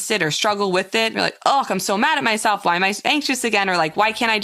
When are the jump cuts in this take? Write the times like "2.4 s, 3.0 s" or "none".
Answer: 1.1 s